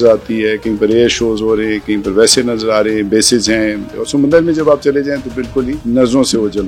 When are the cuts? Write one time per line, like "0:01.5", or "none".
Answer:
0:03.9
0:05.8